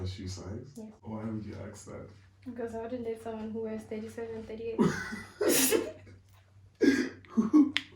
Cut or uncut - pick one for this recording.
cut